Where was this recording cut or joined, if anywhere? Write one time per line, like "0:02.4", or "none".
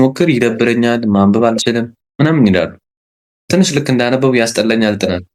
none